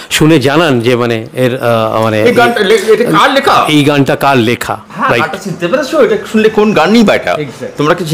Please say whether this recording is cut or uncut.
uncut